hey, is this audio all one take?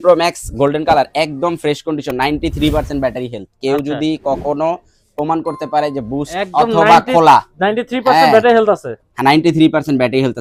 yes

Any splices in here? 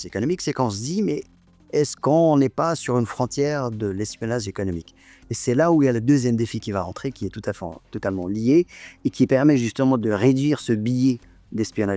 no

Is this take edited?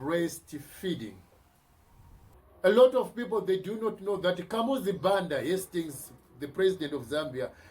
yes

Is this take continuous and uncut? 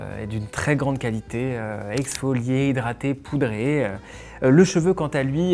yes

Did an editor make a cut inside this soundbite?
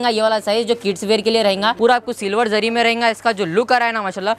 yes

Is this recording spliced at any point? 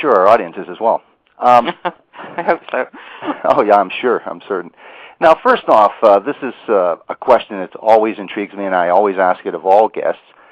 no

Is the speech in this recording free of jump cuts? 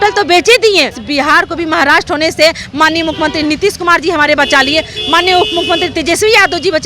no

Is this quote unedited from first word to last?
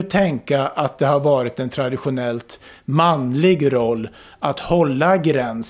yes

